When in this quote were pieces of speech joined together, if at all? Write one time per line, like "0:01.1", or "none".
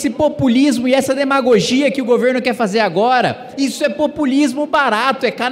0:03.5